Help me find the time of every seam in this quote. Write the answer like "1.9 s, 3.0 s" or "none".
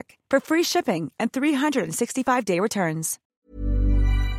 3.4 s